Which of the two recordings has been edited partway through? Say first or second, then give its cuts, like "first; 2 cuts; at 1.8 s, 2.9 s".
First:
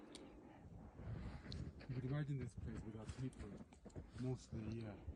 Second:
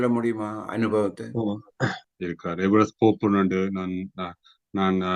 second; 1 cut; at 2.0 s